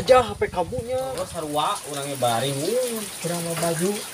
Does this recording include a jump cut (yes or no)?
yes